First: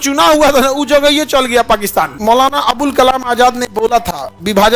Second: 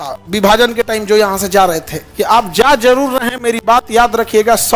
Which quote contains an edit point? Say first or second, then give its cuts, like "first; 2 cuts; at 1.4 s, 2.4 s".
first; 1 cut; at 2.1 s